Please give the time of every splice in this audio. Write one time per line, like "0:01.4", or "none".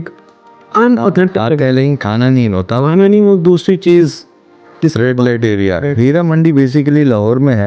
none